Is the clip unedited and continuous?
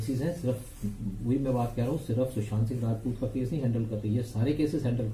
yes; 0 cuts

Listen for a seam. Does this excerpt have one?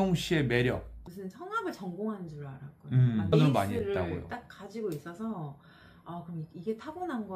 yes; 1 cut; at 1.0 s

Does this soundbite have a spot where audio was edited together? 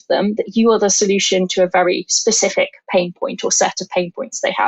no; 0 cuts

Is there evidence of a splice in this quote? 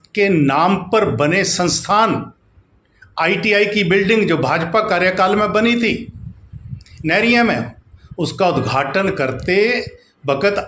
no; 0 cuts

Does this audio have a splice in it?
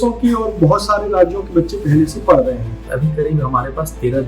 yes; 1 cut; at 2.9 s

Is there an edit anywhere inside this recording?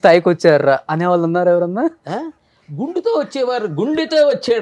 no; 0 cuts

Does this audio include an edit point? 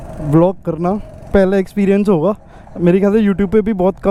no; 0 cuts

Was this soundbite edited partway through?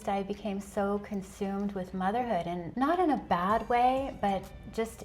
yes; 1 cut; at 2.7 s

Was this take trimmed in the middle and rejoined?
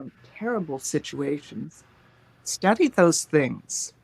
no; 0 cuts

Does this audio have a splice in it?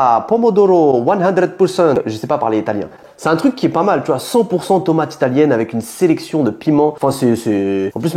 no; 0 cuts

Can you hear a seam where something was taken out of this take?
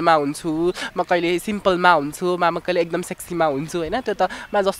no; 0 cuts

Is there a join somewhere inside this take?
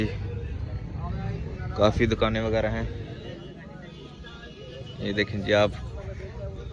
no; 0 cuts

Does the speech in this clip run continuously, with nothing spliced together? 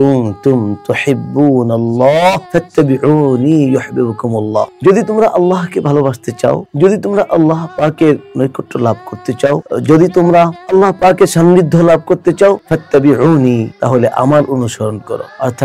yes; 0 cuts

